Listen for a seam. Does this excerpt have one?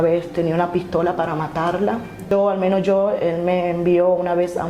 yes; 1 cut; at 2.3 s

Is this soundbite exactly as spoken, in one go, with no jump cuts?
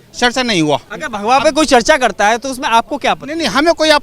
no; 1 cut; at 0.9 s

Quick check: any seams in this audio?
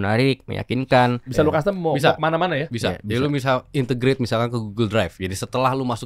yes; 1 cut; at 1.3 s

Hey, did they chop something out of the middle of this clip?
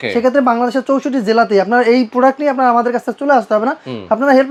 no; 0 cuts

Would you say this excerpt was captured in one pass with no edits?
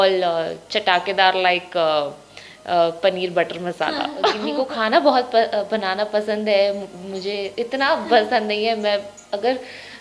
no; 1 cut; at 4.4 s

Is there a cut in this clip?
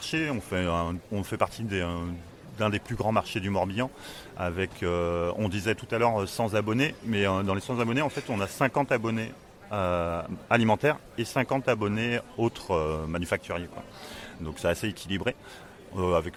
no; 0 cuts

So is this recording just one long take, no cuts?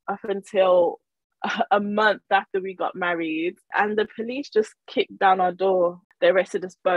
no; 2 cuts; at 3.7 s, 6.0 s

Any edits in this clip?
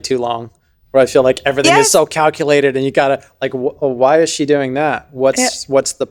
no; 0 cuts

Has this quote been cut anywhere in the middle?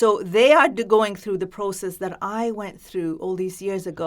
no; 0 cuts

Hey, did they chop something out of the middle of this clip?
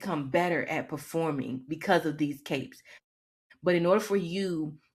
yes; 1 cut; at 3.0 s

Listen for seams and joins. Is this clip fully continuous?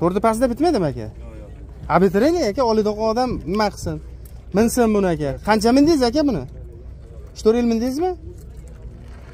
yes; 0 cuts

